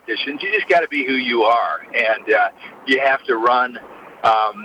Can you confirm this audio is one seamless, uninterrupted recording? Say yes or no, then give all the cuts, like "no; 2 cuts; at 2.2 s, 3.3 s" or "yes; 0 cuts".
yes; 0 cuts